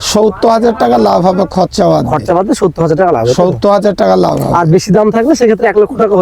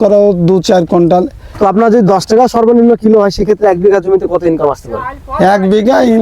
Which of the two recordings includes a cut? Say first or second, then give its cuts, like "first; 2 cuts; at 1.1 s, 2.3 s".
second; 1 cut; at 1.4 s